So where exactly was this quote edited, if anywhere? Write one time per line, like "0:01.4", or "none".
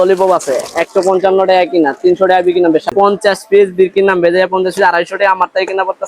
0:02.9